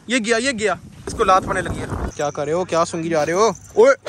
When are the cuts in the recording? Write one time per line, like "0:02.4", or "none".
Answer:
0:01.0
0:02.1